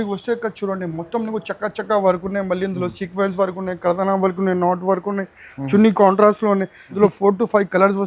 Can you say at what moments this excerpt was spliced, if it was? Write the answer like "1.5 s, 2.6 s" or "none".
6.8 s